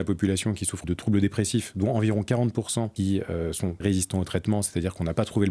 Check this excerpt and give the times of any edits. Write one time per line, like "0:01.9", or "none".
0:00.8
0:02.9
0:03.8